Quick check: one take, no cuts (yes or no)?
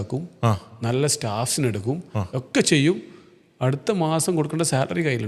yes